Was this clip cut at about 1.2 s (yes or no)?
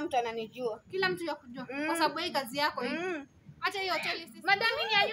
no